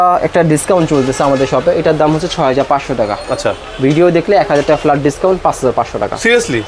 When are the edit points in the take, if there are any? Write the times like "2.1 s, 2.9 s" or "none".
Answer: none